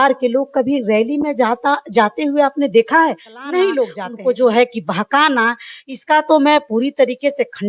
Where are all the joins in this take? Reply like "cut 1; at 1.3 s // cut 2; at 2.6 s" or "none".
cut 1; at 4.0 s

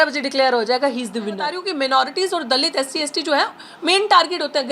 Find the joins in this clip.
cut 1; at 1.6 s

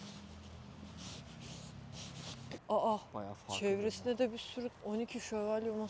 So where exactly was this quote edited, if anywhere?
cut 1; at 2.6 s // cut 2; at 4.8 s

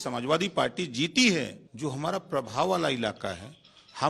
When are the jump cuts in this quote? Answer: cut 1; at 1.6 s

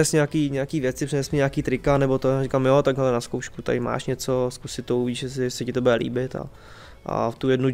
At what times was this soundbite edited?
none

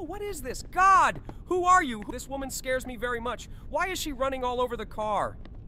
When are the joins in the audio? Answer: none

